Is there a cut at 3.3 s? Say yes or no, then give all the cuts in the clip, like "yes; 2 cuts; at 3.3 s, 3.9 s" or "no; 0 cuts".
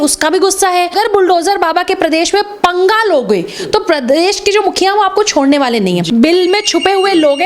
no; 2 cuts; at 0.9 s, 6.0 s